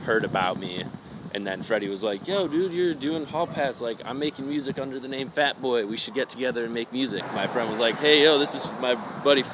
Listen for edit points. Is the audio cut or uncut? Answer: cut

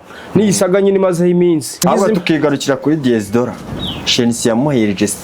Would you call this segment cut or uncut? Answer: cut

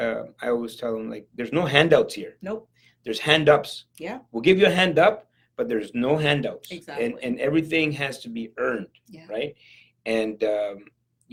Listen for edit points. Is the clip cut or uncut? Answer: uncut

